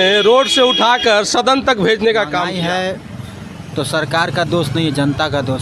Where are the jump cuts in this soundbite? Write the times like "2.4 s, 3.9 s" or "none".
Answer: 2.5 s